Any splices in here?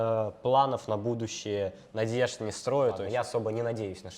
yes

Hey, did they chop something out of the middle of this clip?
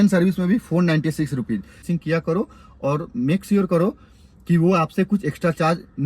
yes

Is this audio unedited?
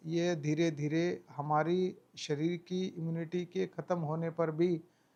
yes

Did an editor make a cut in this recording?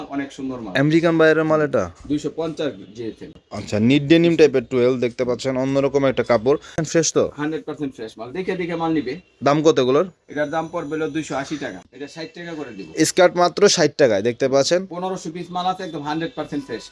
yes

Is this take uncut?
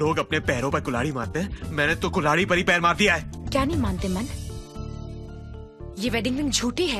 yes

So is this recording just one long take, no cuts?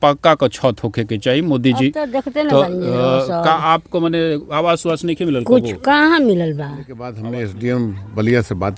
no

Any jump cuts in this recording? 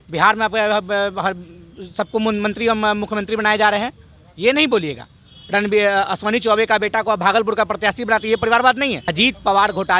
yes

